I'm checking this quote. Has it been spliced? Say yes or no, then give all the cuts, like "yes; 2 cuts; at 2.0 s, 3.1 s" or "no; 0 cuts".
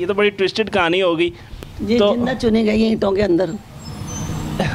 no; 0 cuts